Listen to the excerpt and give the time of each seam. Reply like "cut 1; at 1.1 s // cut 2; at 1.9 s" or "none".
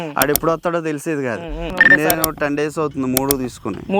cut 1; at 1.7 s